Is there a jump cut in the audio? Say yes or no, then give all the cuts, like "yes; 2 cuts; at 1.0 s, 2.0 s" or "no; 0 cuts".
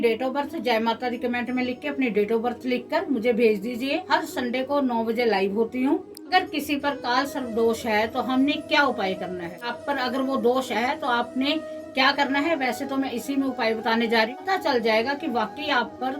yes; 4 cuts; at 4.0 s, 6.1 s, 9.8 s, 14.3 s